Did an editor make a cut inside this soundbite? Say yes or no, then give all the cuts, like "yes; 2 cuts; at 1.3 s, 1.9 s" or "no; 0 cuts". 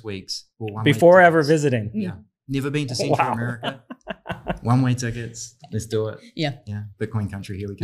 no; 0 cuts